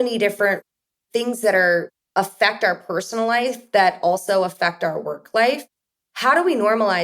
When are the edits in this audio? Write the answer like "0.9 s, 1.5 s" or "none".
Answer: 6.0 s